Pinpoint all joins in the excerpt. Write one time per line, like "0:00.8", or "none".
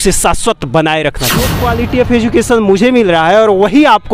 0:01.5